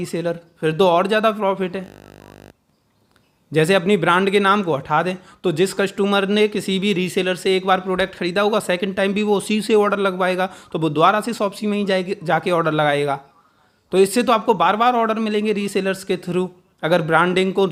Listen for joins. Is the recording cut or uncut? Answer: uncut